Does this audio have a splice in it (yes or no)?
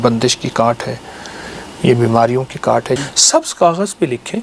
yes